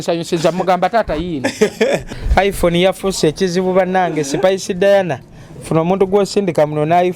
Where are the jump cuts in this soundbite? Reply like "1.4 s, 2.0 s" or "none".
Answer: 2.2 s